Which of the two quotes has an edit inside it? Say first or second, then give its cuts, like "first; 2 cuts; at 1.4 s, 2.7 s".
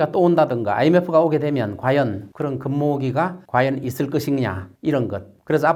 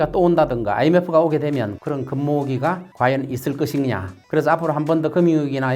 second; 2 cuts; at 1.8 s, 4.1 s